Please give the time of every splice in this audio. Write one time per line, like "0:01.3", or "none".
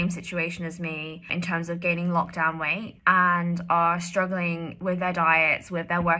0:01.3
0:02.9
0:04.7